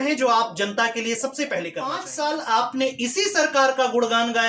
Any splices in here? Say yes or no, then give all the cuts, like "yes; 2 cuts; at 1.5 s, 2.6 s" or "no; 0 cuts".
yes; 1 cut; at 2.1 s